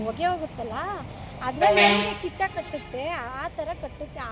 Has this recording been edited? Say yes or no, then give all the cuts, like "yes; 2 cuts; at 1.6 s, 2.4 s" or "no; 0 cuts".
no; 0 cuts